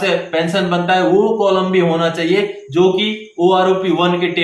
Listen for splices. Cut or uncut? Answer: uncut